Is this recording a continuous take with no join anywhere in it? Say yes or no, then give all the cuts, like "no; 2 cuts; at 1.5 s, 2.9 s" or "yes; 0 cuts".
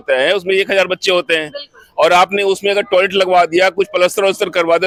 yes; 0 cuts